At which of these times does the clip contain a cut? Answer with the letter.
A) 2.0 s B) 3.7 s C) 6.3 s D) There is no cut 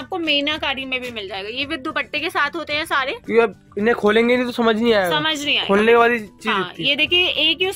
D